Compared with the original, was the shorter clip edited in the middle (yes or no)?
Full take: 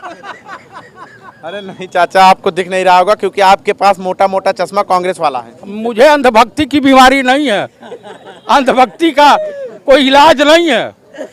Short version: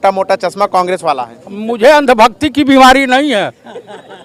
no